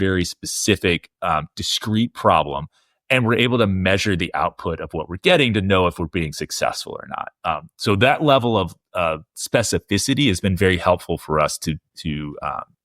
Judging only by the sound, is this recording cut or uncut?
uncut